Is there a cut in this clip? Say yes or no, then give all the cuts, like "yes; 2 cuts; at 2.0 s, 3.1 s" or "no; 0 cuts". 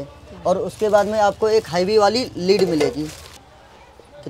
yes; 1 cut; at 3.3 s